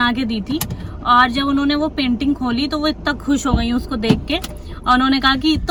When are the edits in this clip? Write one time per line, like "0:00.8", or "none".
none